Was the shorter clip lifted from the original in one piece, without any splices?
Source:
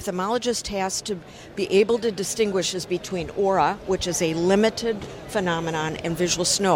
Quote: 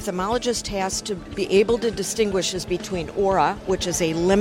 no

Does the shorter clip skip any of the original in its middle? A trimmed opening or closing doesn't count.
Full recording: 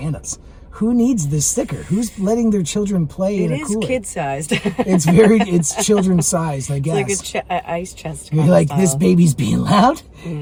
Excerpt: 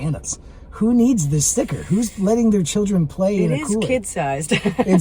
no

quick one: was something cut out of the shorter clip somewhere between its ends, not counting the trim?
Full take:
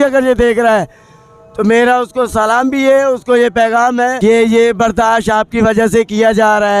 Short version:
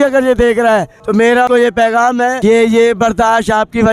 yes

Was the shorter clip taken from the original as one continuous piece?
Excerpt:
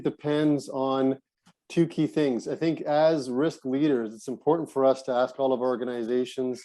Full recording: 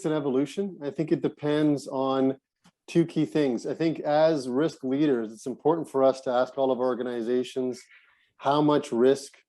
yes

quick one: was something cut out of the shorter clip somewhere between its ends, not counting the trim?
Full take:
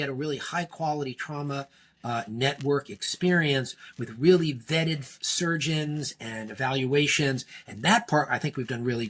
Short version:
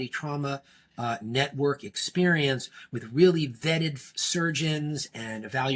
no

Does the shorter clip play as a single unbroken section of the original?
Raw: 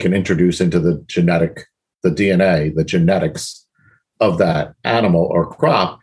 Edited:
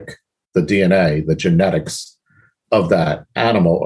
yes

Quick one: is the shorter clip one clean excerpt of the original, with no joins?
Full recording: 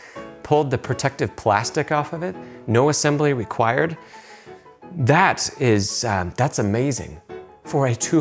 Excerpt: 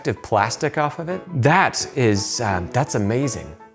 no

